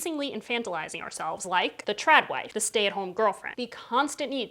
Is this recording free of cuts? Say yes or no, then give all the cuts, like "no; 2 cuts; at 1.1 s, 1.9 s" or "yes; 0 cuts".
no; 3 cuts; at 1.5 s, 2.5 s, 3.5 s